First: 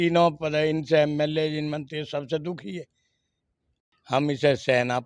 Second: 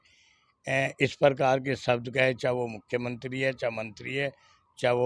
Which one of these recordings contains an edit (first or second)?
first